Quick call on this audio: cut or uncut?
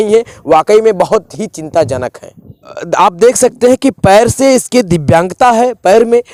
uncut